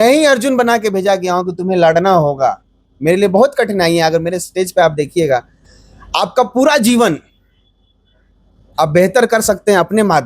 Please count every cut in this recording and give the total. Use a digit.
1